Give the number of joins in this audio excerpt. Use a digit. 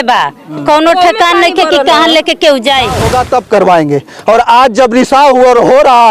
1